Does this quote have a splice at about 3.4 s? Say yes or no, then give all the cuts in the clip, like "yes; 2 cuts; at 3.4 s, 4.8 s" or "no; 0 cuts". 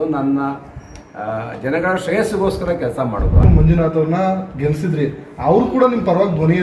yes; 1 cut; at 3.4 s